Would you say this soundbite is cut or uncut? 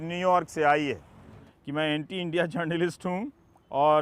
cut